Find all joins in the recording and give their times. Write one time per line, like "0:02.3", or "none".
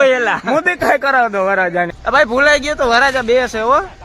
0:01.9